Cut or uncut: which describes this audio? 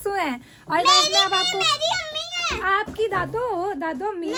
uncut